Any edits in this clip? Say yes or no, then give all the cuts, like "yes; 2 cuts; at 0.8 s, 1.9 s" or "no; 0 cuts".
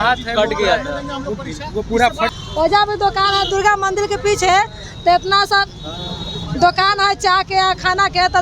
yes; 1 cut; at 2.3 s